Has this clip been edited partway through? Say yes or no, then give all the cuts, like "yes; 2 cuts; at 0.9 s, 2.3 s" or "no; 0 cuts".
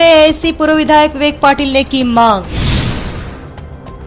yes; 1 cut; at 3.1 s